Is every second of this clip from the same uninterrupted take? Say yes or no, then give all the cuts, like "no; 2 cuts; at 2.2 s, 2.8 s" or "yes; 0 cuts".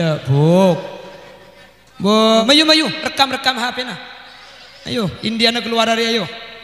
no; 1 cut; at 2.4 s